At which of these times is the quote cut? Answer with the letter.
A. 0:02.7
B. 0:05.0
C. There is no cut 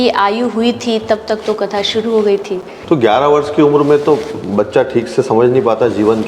A